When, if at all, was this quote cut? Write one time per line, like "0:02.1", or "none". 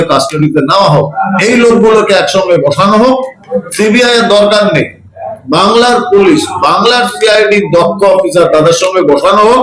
0:01.2
0:03.4